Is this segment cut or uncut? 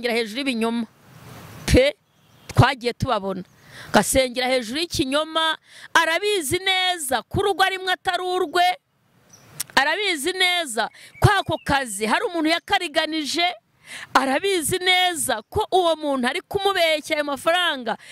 uncut